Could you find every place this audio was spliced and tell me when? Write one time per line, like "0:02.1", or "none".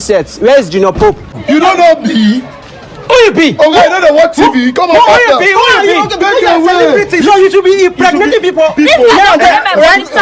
0:01.4